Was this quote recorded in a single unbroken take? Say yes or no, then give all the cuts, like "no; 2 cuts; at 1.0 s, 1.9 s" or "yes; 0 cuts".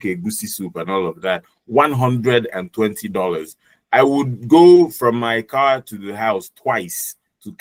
yes; 0 cuts